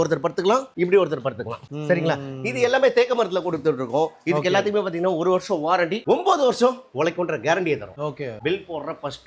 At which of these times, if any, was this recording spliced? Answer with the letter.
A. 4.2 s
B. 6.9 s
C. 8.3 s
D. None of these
C